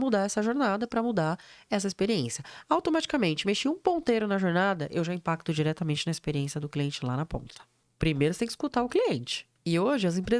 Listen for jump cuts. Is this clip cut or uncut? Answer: cut